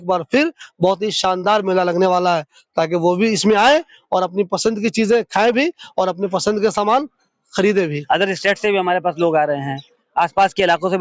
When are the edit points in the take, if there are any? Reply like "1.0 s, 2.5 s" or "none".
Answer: 8.0 s